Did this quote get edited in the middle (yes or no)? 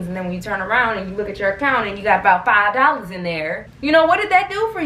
yes